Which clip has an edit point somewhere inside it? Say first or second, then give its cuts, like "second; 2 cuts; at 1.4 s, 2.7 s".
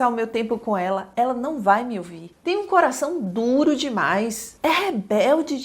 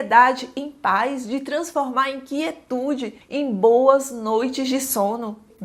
first; 2 cuts; at 2.3 s, 4.4 s